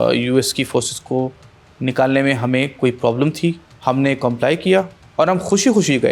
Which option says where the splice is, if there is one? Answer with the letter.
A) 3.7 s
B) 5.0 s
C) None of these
A